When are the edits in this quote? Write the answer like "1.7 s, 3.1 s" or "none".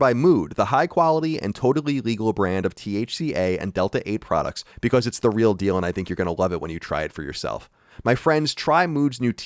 4.6 s